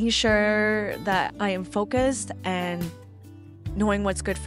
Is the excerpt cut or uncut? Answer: uncut